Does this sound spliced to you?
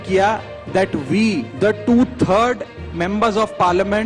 yes; 1 cut; at 1.5 s

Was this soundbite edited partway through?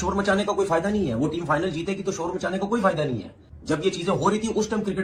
no; 0 cuts

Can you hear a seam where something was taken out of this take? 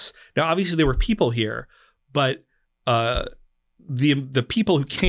no; 0 cuts

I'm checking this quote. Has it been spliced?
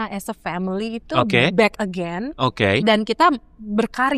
no; 0 cuts

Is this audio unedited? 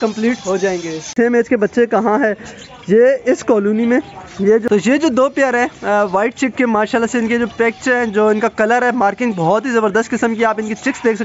no; 2 cuts; at 1.1 s, 4.6 s

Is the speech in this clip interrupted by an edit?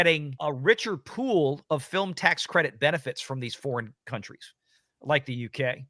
no; 0 cuts

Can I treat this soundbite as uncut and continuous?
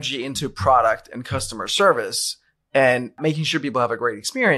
no; 1 cut; at 3.2 s

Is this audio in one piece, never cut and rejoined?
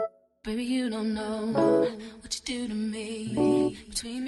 yes; 0 cuts

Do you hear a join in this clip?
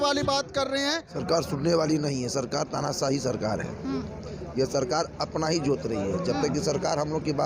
yes; 1 cut; at 1.2 s

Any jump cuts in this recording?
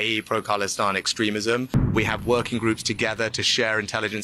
yes; 1 cut; at 1.9 s

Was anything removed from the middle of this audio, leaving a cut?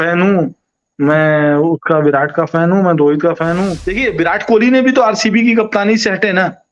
yes; 1 cut; at 3.8 s

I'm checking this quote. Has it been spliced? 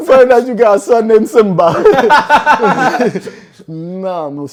no; 0 cuts

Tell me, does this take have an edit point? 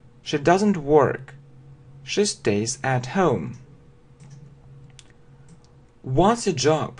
no; 0 cuts

